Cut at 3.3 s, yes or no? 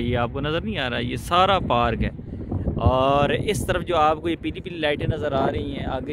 no